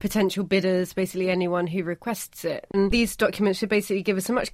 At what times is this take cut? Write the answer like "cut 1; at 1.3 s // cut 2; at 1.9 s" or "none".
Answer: none